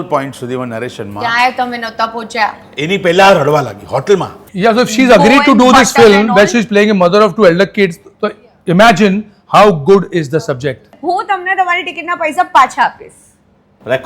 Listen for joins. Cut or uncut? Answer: cut